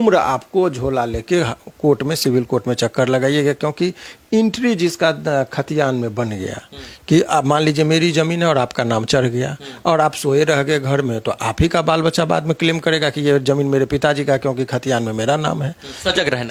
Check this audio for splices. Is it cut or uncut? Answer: uncut